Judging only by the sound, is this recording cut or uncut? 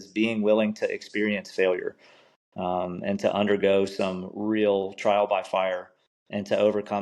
uncut